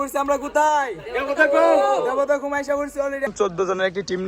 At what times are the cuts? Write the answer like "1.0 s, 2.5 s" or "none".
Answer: 3.3 s